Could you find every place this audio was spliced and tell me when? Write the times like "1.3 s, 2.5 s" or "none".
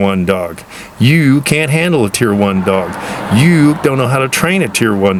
none